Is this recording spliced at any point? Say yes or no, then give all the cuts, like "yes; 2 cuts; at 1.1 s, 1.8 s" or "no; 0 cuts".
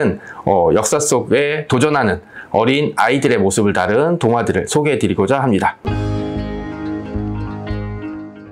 yes; 1 cut; at 5.8 s